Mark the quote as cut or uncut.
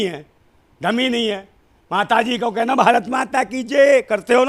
uncut